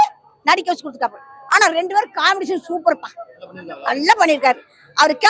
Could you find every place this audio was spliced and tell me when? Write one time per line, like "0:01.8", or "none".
none